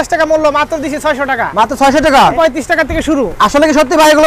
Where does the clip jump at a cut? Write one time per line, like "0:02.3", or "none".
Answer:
0:02.3